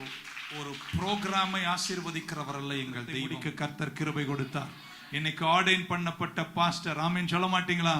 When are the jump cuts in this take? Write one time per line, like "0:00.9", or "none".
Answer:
0:03.3